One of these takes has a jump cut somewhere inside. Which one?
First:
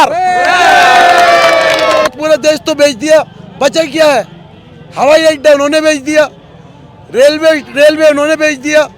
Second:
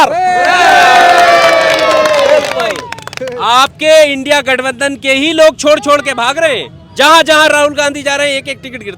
first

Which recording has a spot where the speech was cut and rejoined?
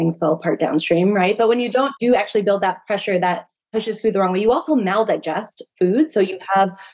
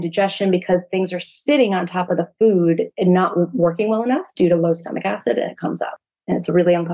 first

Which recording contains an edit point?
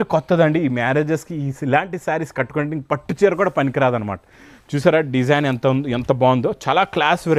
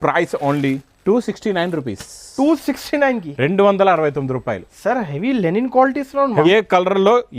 second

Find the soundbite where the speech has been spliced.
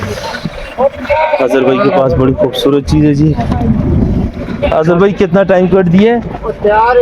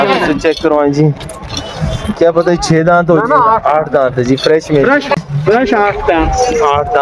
second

